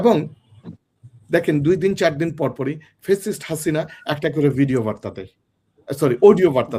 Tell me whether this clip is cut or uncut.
uncut